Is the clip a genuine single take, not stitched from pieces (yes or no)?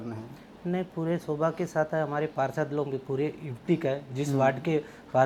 yes